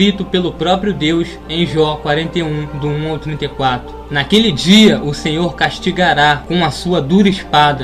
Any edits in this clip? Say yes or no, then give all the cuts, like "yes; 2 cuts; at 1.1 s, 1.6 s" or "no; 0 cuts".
no; 0 cuts